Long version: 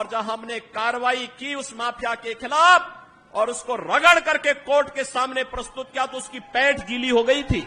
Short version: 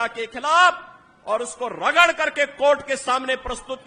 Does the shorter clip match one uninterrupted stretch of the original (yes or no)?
yes